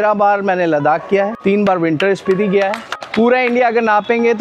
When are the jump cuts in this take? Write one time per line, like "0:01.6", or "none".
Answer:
0:01.3
0:02.9